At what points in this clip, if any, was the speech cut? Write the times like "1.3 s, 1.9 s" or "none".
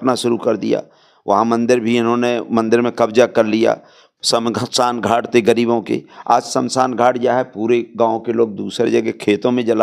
none